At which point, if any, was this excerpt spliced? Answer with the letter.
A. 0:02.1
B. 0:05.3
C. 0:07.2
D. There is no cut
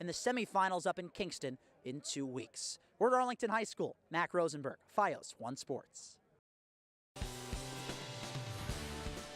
C